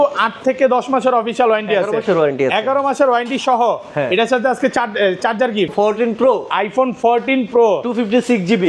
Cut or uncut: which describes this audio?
cut